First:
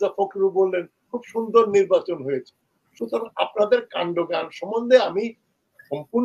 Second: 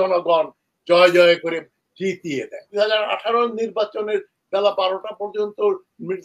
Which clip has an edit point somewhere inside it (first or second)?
second